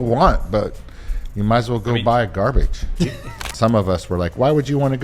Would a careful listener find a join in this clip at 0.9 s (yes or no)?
no